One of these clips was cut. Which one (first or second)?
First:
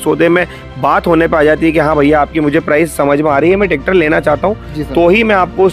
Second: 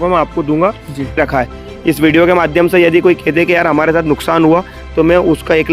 second